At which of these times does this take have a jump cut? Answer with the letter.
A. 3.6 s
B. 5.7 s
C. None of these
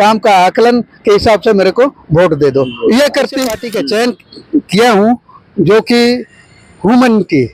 A